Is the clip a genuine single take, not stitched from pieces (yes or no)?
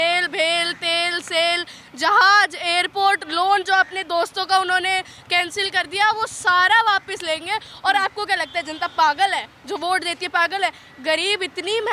yes